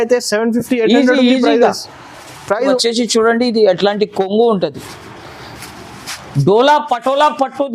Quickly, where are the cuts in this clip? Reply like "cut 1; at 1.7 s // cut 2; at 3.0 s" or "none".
cut 1; at 2.8 s